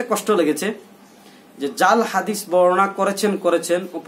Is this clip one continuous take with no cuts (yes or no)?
yes